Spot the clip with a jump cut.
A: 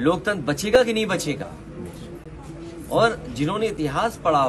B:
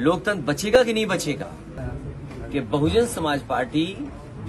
B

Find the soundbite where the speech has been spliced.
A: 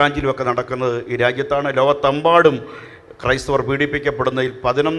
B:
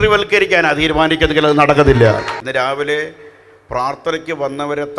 B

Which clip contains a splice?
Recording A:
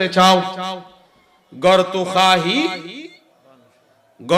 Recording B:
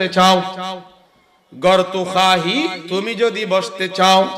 B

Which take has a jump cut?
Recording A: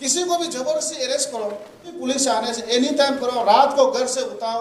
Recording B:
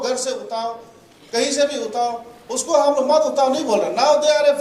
A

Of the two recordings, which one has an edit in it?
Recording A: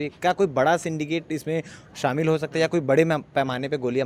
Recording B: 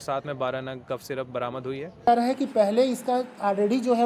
B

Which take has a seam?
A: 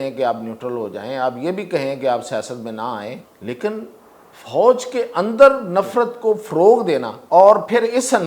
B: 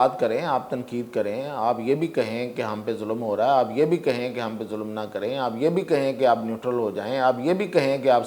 A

